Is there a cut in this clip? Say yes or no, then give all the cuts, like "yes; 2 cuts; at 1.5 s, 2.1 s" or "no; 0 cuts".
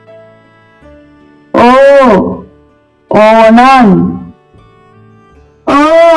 yes; 1 cut; at 1.1 s